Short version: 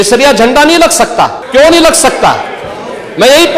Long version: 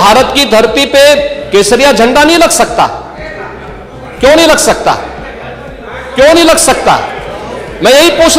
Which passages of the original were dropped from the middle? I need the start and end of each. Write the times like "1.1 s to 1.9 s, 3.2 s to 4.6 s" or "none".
3.0 s to 6.0 s